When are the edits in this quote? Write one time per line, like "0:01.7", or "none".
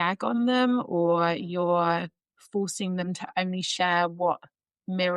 none